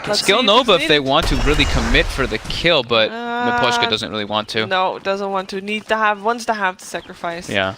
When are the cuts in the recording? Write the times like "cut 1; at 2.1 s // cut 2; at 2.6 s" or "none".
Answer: cut 1; at 3.7 s